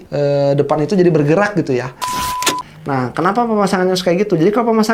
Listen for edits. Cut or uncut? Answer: cut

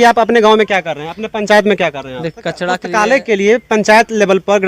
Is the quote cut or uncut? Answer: cut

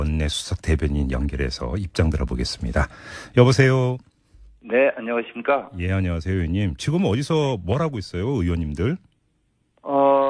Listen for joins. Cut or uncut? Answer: uncut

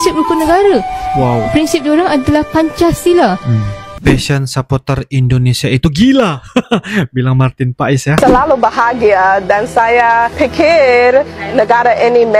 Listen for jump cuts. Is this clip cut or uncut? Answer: cut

